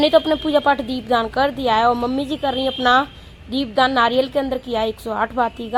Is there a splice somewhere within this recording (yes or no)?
no